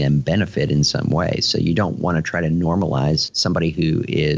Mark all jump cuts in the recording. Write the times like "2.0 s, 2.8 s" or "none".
none